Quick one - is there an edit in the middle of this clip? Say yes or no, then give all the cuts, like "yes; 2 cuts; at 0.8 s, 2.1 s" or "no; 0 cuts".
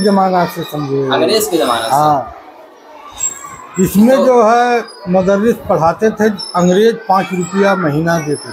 no; 0 cuts